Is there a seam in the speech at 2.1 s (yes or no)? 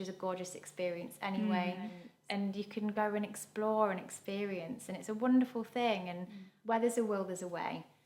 yes